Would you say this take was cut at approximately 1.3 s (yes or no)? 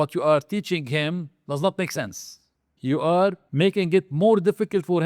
no